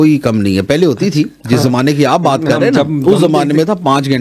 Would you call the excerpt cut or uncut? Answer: uncut